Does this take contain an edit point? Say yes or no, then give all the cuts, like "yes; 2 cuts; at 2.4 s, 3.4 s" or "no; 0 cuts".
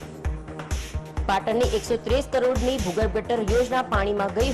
no; 0 cuts